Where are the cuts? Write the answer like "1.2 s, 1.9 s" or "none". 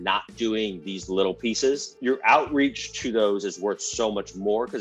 1.9 s